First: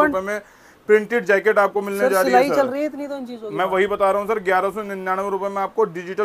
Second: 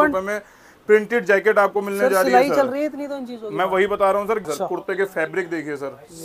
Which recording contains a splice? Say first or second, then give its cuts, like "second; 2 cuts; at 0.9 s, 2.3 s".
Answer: second; 1 cut; at 4.4 s